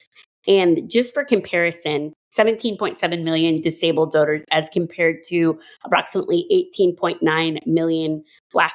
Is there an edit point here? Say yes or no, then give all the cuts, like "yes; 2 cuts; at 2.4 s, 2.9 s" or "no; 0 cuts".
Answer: yes; 1 cut; at 2.2 s